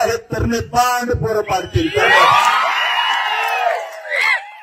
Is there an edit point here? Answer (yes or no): no